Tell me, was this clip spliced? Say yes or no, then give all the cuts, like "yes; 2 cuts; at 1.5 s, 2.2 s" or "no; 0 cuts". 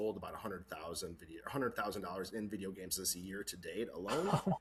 no; 0 cuts